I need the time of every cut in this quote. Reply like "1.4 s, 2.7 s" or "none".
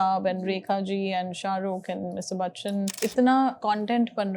2.9 s, 3.6 s

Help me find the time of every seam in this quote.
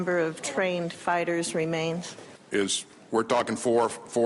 2.8 s

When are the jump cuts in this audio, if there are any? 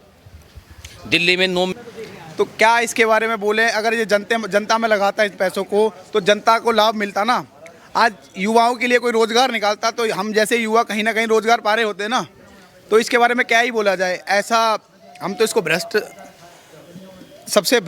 1.7 s

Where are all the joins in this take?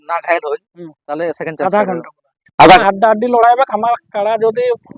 2.8 s

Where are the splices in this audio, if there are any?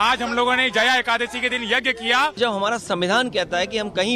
2.4 s

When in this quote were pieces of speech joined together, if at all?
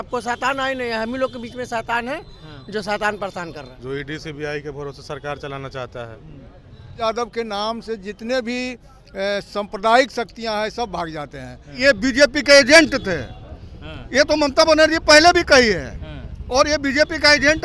3.7 s, 7.0 s, 11.8 s

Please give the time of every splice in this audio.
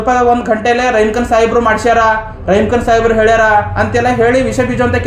none

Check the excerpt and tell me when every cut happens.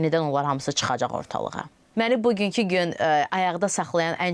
1.8 s

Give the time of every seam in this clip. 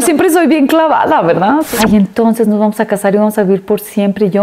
1.7 s

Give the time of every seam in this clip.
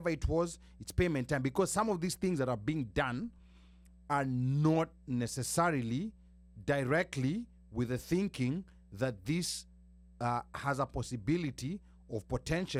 none

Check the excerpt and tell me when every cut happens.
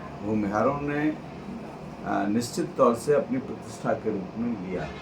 none

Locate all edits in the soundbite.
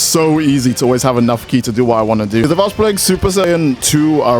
2.4 s, 3.5 s

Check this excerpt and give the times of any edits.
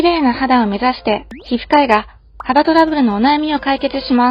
none

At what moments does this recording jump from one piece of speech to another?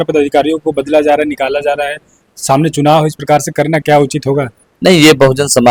none

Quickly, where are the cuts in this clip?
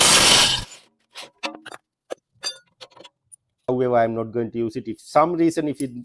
3.7 s

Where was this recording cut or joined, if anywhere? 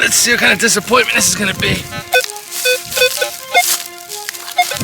1.9 s

